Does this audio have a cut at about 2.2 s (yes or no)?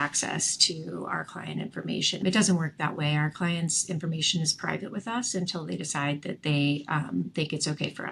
yes